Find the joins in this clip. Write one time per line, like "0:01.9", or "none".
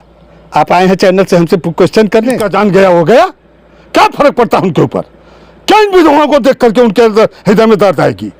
0:02.4